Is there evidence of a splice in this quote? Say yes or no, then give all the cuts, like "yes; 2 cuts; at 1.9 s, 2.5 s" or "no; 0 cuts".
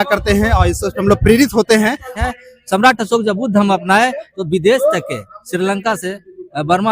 yes; 1 cut; at 2.2 s